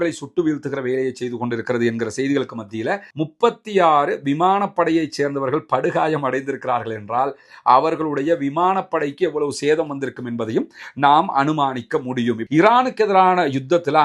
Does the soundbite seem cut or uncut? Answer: cut